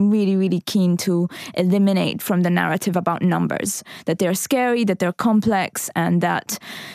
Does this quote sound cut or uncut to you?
cut